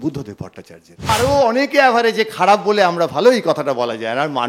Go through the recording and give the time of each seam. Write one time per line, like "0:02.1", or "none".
0:01.1